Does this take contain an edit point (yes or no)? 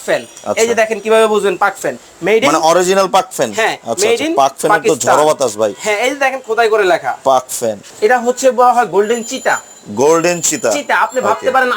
yes